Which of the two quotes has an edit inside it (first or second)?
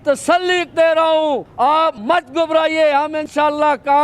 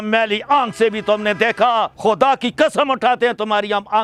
first